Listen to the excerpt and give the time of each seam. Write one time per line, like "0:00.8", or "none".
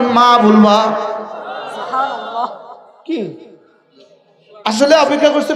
none